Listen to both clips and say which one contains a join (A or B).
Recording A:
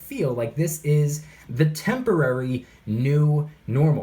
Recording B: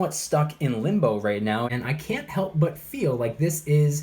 B